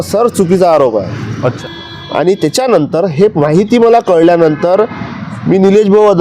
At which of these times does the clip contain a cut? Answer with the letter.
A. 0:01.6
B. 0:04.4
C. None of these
A